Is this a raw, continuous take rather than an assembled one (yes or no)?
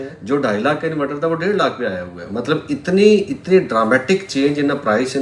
yes